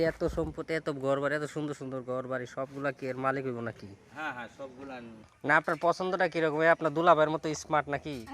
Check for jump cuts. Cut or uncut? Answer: cut